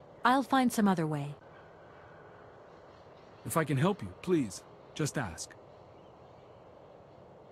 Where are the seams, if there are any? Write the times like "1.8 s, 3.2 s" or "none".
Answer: none